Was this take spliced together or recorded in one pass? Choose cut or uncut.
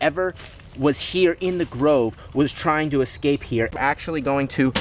cut